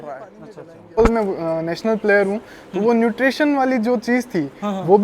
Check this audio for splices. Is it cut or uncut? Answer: cut